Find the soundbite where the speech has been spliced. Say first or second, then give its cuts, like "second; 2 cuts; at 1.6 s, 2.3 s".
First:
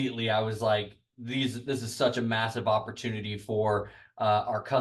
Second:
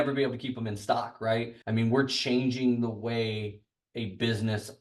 second; 1 cut; at 1.6 s